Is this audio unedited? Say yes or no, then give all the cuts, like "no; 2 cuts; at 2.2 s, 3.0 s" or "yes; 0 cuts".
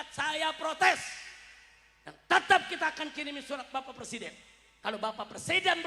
yes; 0 cuts